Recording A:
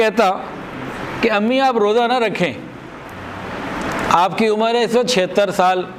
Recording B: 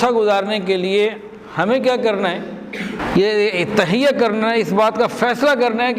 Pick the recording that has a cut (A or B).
B